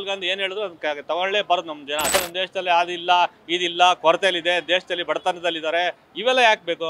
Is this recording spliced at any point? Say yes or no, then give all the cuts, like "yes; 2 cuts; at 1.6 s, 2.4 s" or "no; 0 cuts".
yes; 1 cut; at 2.1 s